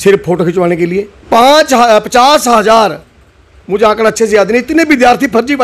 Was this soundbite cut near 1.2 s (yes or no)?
yes